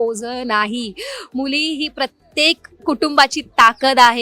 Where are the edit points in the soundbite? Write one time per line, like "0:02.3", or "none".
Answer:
none